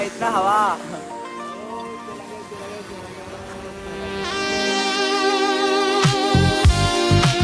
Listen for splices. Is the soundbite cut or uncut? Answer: uncut